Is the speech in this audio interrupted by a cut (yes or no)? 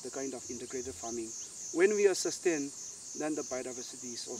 yes